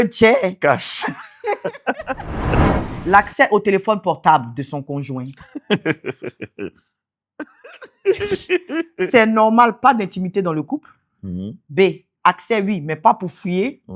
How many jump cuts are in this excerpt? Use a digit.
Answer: 1